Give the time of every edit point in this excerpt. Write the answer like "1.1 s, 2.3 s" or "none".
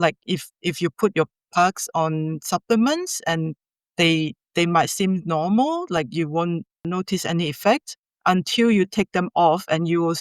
6.8 s